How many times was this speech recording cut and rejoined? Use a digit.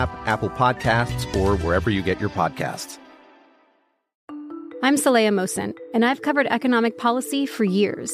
1